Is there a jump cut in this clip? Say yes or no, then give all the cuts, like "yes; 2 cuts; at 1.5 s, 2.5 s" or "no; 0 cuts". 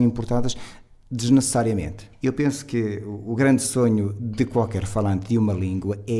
yes; 1 cut; at 2.0 s